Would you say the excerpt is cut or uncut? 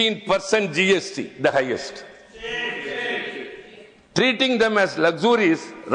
uncut